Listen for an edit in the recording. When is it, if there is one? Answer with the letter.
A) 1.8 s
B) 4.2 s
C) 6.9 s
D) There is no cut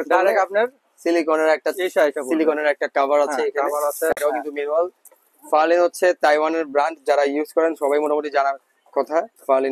B